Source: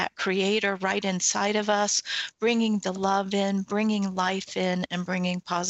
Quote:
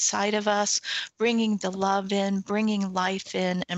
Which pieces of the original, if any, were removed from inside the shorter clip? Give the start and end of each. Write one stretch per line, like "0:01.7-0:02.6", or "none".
none